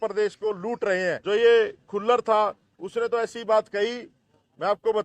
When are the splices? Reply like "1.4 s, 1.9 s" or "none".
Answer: 1.2 s